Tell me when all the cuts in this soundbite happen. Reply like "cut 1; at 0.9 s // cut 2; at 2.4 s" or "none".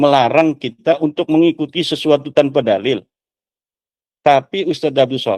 none